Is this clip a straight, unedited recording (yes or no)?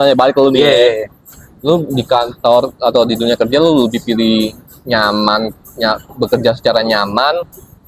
yes